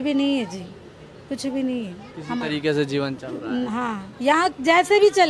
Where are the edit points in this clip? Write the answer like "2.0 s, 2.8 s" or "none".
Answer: none